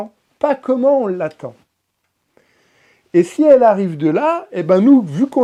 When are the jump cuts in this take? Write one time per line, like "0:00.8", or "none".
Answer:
none

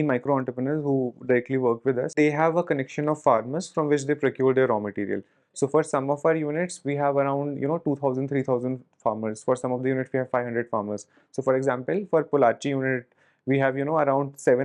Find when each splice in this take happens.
0:02.1

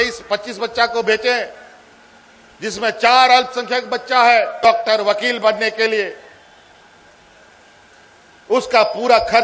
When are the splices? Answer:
0:04.7

